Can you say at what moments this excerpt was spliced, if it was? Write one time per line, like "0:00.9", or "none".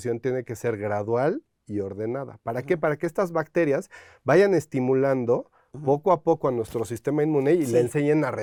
none